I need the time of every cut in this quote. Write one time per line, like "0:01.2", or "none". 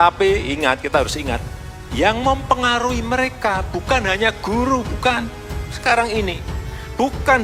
none